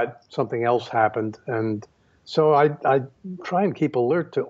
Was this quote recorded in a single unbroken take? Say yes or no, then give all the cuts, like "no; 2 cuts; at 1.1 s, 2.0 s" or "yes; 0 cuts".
yes; 0 cuts